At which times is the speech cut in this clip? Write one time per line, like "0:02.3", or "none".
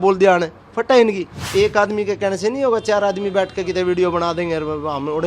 0:01.3